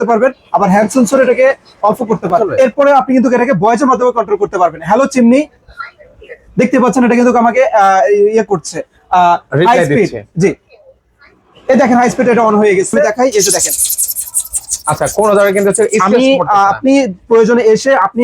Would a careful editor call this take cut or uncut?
cut